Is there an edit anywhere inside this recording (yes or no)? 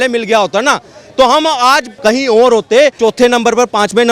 yes